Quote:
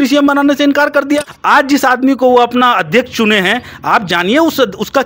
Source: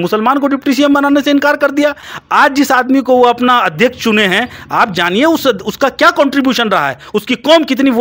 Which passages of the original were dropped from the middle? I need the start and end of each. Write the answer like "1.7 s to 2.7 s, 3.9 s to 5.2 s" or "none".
2.0 s to 2.2 s